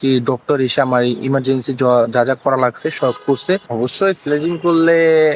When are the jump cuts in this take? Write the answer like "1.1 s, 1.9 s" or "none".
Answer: 3.7 s